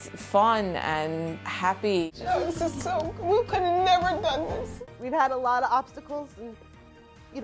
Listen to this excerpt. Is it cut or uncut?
cut